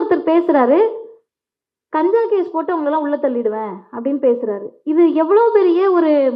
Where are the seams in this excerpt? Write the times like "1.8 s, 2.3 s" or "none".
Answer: none